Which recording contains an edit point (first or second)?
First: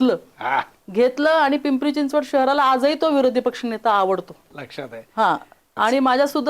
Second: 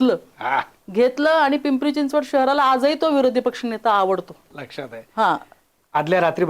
second